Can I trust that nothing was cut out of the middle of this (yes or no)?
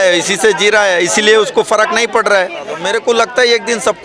no